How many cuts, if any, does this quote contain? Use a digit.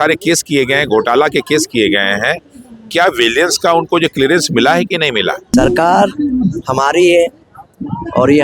1